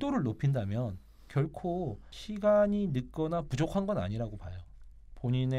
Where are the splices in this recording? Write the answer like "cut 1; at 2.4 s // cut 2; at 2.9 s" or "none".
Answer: cut 1; at 2.1 s